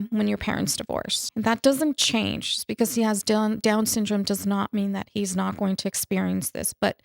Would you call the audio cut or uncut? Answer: cut